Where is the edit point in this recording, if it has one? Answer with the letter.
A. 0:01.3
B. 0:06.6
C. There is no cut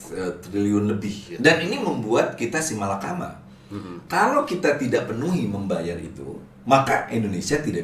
A